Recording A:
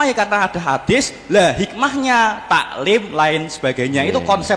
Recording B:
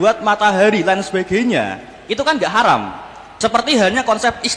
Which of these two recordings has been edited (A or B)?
B